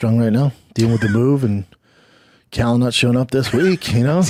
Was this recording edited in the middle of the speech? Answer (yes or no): no